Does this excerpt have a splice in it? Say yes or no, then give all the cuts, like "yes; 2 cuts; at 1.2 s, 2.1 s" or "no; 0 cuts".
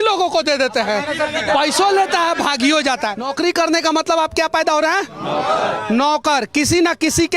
yes; 1 cut; at 3.3 s